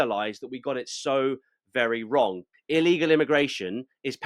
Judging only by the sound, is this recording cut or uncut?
cut